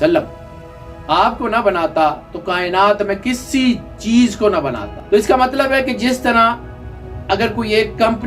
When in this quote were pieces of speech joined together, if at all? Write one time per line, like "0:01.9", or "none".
0:04.9